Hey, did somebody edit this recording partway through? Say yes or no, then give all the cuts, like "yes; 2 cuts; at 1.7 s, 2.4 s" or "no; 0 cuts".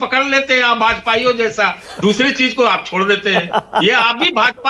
no; 0 cuts